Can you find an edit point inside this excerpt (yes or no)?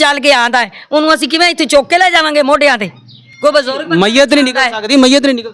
no